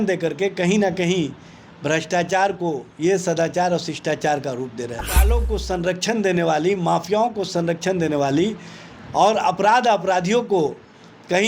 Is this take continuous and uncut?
no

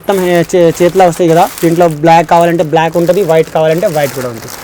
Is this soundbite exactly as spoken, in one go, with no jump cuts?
yes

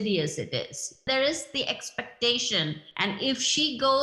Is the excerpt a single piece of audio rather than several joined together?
no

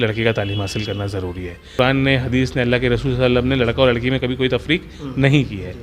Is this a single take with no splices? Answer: no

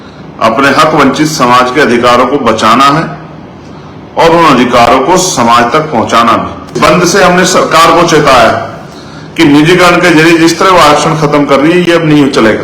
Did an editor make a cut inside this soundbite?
yes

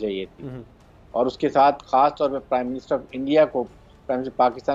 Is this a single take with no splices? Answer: yes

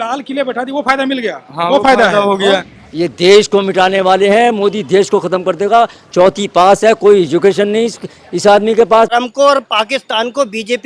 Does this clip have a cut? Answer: yes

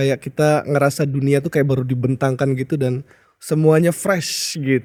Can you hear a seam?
no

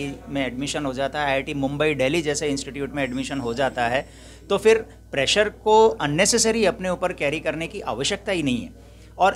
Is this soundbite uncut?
yes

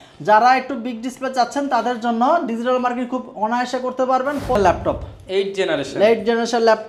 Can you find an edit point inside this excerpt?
yes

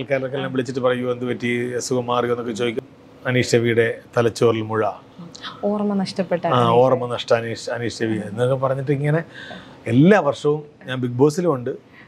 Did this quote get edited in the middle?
yes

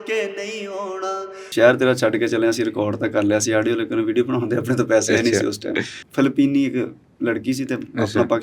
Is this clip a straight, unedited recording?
no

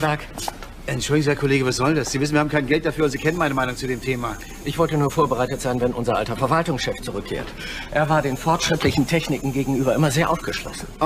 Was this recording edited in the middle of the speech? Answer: yes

